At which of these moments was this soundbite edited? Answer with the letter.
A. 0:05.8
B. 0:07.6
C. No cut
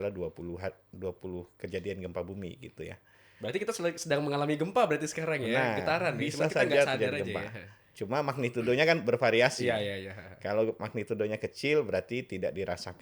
C